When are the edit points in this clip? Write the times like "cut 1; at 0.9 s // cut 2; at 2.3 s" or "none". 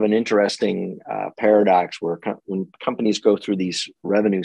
none